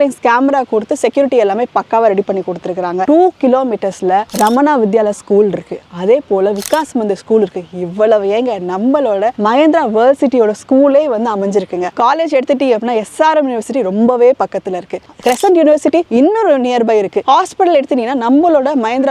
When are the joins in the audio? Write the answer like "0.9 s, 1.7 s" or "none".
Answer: 3.0 s, 11.9 s, 17.2 s